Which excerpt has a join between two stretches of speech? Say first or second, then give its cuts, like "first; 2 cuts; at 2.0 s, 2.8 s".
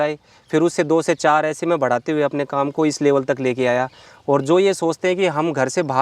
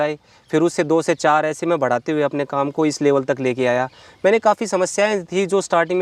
first; 1 cut; at 4.0 s